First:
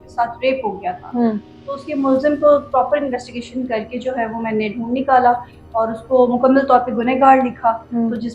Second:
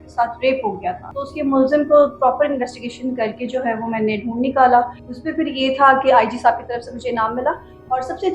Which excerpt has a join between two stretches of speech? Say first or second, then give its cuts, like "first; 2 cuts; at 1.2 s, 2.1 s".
second; 2 cuts; at 1.0 s, 5.0 s